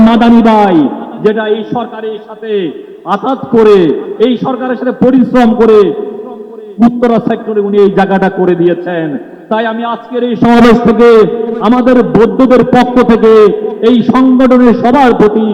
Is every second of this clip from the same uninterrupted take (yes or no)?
yes